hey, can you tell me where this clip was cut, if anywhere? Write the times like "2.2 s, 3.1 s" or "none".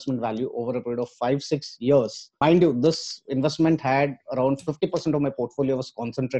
2.4 s